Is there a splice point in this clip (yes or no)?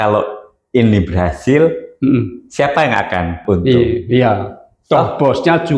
yes